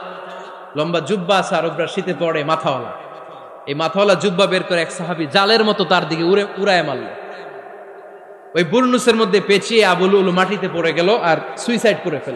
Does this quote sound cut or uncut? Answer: uncut